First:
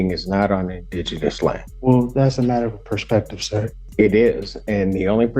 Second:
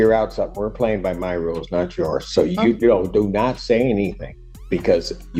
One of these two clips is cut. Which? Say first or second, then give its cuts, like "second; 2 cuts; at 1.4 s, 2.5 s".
first; 2 cuts; at 1.7 s, 3.8 s